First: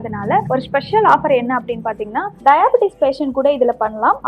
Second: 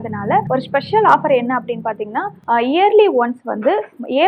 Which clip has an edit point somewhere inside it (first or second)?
first